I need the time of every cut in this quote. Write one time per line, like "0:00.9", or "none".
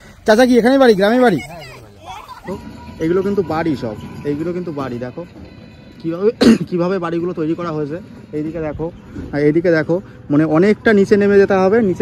0:02.4